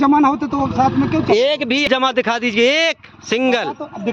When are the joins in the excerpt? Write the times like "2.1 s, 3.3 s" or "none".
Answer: 1.9 s